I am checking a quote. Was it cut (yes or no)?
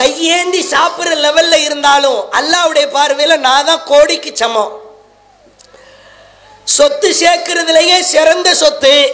no